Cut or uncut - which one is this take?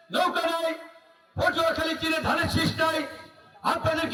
uncut